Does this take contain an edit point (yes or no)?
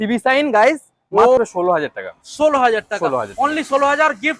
yes